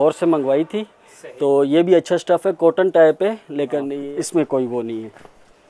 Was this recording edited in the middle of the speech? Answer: yes; 1 cut; at 4.0 s

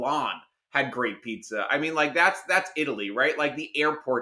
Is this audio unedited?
yes; 0 cuts

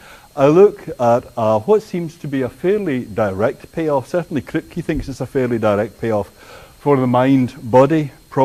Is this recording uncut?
no; 1 cut; at 6.7 s

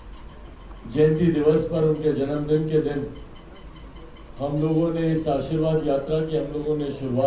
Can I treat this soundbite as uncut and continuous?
yes; 0 cuts

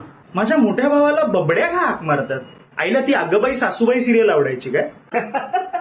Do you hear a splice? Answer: no; 0 cuts

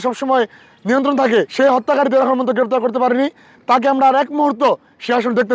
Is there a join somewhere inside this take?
yes; 1 cut; at 1.5 s

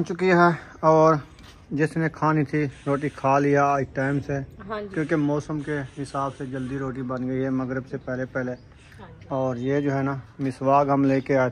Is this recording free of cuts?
yes; 0 cuts

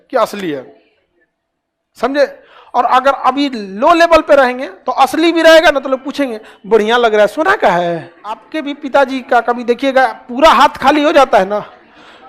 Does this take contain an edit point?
yes; 1 cut; at 8.5 s

